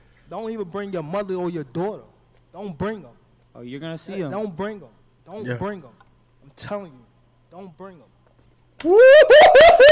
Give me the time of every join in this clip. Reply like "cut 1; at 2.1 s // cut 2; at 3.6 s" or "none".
none